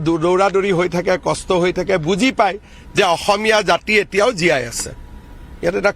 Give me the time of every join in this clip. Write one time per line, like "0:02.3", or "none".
0:03.4